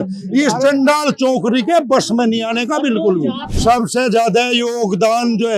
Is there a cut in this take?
yes; 1 cut; at 3.5 s

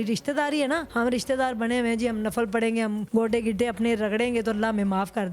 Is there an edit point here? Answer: yes; 2 cuts; at 0.9 s, 3.0 s

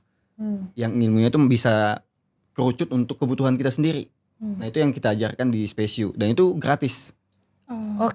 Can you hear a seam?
no; 0 cuts

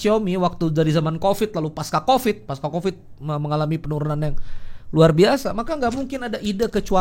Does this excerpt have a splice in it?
no; 0 cuts

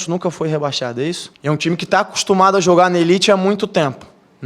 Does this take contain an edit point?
yes; 1 cut; at 1.3 s

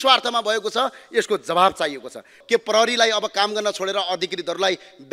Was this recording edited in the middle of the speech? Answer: yes; 1 cut; at 2.3 s

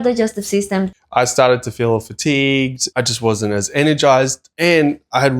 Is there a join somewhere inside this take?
yes; 3 cuts; at 1.0 s, 2.9 s, 4.5 s

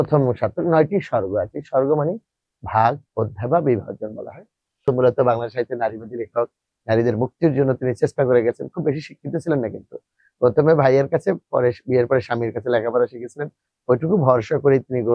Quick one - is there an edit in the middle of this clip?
yes; 1 cut; at 4.8 s

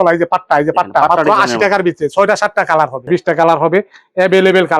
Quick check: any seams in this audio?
yes; 1 cut; at 3.0 s

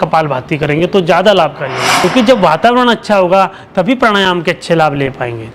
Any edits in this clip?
yes; 1 cut; at 1.8 s

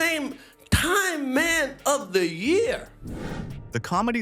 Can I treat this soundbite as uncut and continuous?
yes; 0 cuts

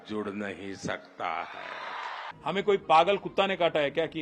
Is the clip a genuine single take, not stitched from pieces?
no; 1 cut; at 2.2 s

